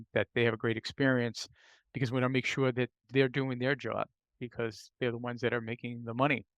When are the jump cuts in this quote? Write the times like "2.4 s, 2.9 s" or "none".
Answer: 3.0 s, 4.8 s